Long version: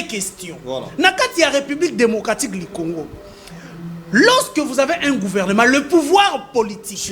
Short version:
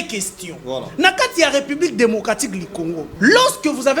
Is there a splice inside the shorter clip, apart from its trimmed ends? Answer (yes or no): yes